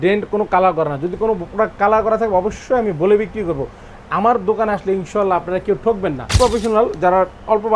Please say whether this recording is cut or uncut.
cut